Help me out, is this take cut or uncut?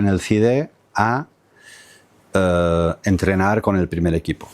uncut